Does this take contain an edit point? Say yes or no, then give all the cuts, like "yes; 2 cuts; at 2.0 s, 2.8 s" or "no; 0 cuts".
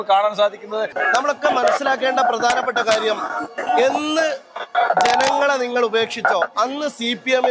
yes; 1 cut; at 0.9 s